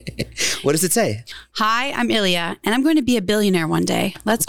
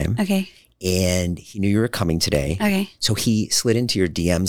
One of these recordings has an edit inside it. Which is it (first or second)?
first